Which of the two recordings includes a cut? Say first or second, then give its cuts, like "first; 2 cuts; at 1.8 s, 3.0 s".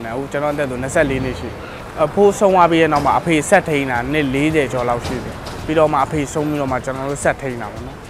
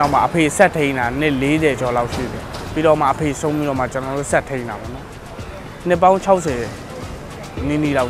first; 1 cut; at 1.9 s